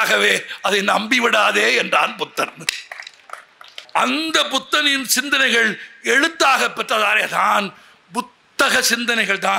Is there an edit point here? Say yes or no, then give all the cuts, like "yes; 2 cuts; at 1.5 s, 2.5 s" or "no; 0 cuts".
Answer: yes; 1 cut; at 3.8 s